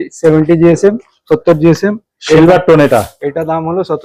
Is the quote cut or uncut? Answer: uncut